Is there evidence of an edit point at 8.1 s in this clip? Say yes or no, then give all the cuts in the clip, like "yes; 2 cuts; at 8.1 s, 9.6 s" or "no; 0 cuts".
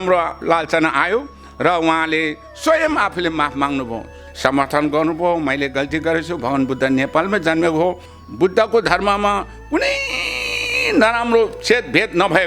yes; 2 cuts; at 4.2 s, 8.1 s